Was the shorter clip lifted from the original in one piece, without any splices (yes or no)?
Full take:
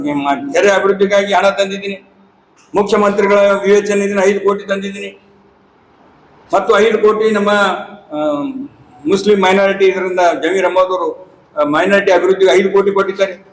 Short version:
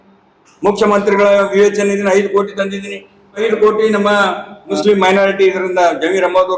no